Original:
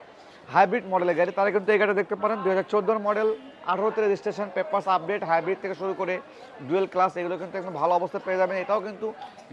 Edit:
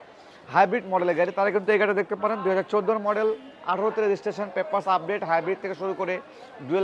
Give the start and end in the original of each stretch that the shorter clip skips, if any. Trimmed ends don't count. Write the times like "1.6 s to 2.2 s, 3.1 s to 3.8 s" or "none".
none